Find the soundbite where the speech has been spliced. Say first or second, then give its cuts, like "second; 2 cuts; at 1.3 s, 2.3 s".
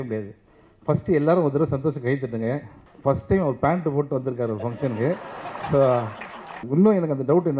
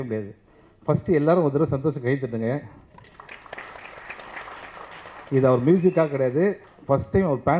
first; 2 cuts; at 2.9 s, 6.6 s